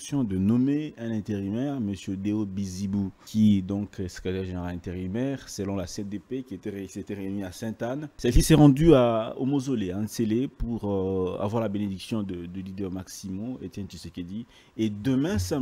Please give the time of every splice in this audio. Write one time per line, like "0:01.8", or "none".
0:03.2
0:08.1